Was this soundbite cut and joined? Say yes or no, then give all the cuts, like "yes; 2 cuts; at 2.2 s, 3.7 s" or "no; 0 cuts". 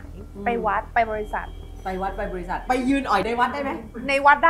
no; 0 cuts